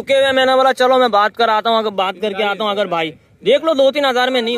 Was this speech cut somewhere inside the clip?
no; 0 cuts

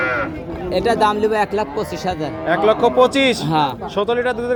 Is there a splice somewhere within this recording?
no; 0 cuts

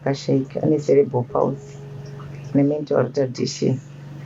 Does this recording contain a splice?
no; 0 cuts

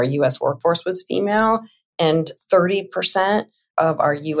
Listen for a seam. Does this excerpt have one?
no; 0 cuts

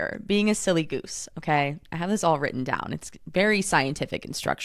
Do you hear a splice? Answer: no; 0 cuts

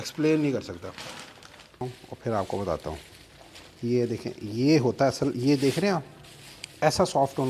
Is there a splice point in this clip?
yes; 1 cut; at 1.8 s

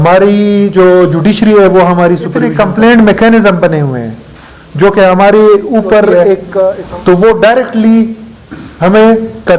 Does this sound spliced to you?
yes; 2 cuts; at 2.5 s, 6.8 s

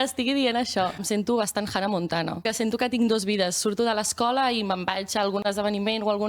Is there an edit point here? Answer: yes; 2 cuts; at 1.0 s, 2.5 s

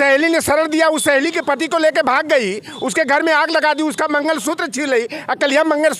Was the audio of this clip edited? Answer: no; 0 cuts

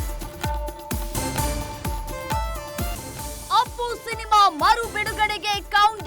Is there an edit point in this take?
yes; 1 cut; at 3.2 s

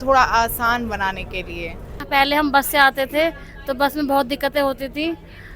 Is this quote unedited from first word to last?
no; 1 cut; at 2.0 s

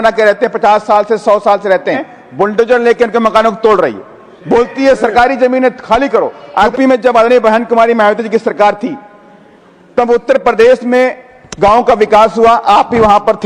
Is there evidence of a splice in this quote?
yes; 2 cuts; at 2.1 s, 6.7 s

